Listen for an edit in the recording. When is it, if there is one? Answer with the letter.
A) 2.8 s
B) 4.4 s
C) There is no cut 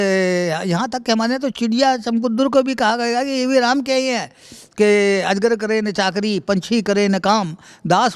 C